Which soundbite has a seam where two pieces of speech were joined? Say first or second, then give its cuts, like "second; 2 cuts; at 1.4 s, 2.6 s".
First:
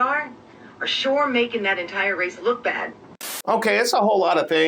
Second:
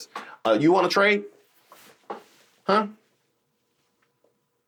first; 1 cut; at 3.3 s